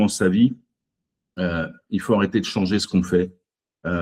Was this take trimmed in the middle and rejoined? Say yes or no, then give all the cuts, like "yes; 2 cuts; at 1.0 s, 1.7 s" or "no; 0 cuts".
no; 0 cuts